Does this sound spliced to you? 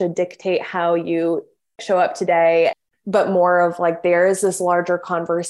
yes; 2 cuts; at 1.8 s, 2.8 s

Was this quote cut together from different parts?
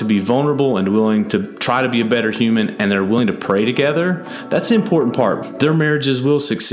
yes; 1 cut; at 5.4 s

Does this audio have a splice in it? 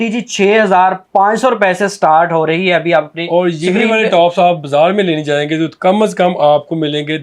no; 0 cuts

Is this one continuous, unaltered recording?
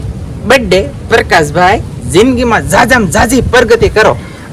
yes; 0 cuts

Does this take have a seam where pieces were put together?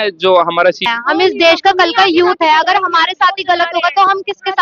yes; 1 cut; at 0.9 s

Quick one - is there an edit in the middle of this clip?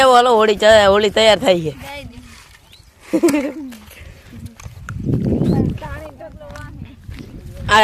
no; 0 cuts

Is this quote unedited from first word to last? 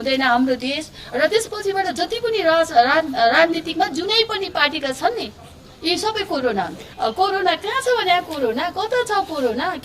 no; 1 cut; at 6.9 s

